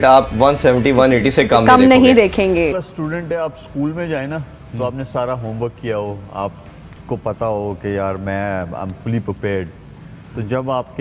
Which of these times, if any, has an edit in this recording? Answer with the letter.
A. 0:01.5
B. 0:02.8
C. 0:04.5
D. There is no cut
B